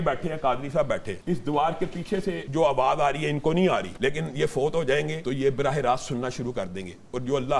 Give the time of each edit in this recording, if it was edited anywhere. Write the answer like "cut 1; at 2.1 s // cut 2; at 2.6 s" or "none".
cut 1; at 1.1 s // cut 2; at 2.4 s // cut 3; at 3.9 s // cut 4; at 5.2 s